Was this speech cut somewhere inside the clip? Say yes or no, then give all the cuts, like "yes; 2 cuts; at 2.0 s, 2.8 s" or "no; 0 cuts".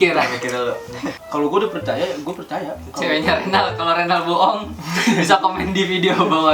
yes; 1 cut; at 1.2 s